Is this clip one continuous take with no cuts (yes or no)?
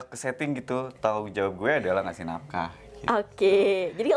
yes